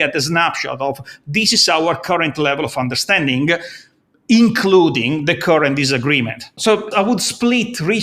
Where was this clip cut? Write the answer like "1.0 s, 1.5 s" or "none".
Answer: 6.5 s